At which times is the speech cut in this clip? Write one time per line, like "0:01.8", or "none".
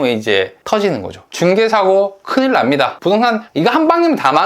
0:01.3
0:03.3